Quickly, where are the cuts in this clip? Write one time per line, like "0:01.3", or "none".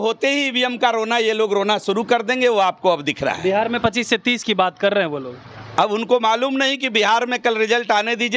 none